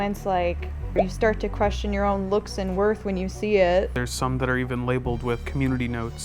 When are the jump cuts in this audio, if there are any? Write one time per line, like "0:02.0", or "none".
none